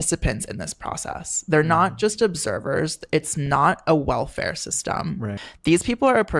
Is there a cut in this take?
yes; 1 cut; at 5.4 s

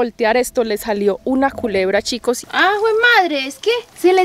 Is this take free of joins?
no; 1 cut; at 2.4 s

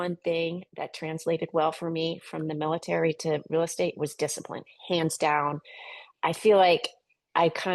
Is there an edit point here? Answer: no; 0 cuts

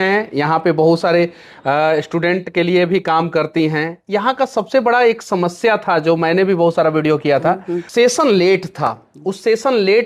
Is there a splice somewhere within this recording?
yes; 1 cut; at 7.9 s

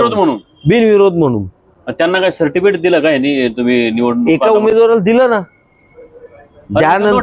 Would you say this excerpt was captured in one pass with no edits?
yes; 0 cuts

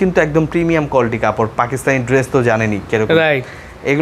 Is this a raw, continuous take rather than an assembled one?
yes; 0 cuts

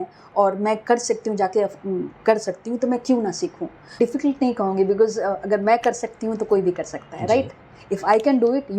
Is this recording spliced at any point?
yes; 1 cut; at 4.0 s

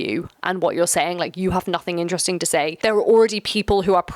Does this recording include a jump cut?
yes; 1 cut; at 2.8 s

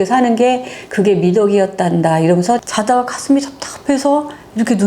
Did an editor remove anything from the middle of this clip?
yes; 1 cut; at 2.7 s

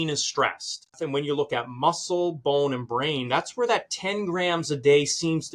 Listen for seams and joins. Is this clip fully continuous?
no; 1 cut; at 1.0 s

